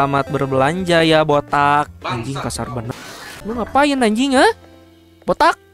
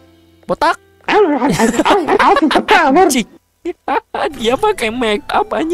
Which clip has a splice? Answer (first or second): first